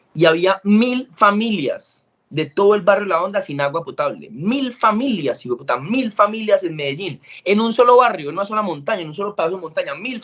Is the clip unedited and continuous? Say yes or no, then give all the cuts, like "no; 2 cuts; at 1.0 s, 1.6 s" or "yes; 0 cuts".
yes; 0 cuts